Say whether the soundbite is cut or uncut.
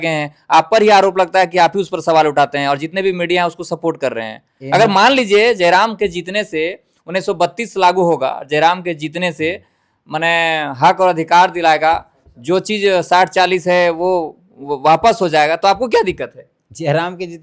uncut